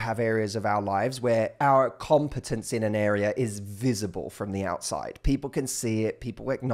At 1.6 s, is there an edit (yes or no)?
yes